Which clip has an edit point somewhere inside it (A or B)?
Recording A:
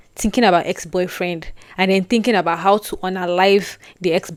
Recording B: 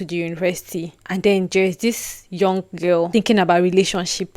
B